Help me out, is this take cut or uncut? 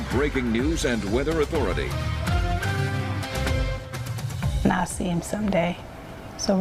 cut